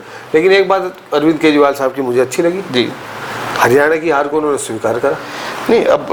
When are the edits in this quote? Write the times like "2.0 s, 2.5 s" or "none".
none